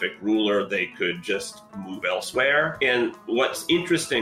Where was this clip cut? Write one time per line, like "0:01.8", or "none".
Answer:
0:02.7